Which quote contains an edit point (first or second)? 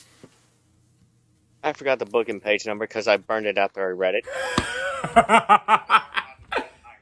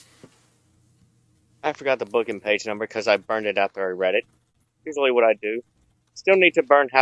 second